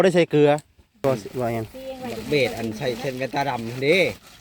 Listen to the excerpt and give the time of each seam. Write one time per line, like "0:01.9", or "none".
0:01.0